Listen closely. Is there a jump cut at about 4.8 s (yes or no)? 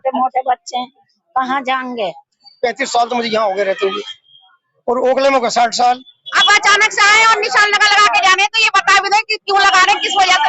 no